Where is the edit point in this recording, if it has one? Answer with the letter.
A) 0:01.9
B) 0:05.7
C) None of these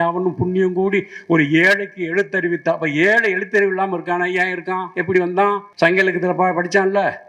B